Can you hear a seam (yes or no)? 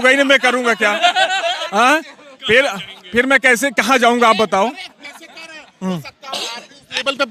no